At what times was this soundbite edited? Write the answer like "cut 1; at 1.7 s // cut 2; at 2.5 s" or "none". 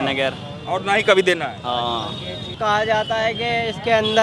none